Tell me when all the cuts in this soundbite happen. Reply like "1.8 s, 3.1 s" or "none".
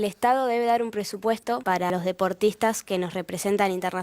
1.9 s